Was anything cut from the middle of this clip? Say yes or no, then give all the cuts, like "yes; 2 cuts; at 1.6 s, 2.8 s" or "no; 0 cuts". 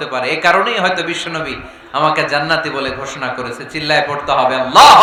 no; 0 cuts